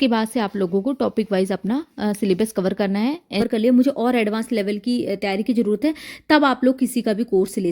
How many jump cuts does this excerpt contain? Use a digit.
1